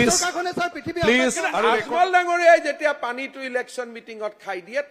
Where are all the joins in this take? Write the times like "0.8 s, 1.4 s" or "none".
1.5 s